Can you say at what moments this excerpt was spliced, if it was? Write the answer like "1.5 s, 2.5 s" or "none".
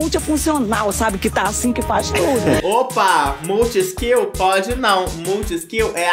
2.6 s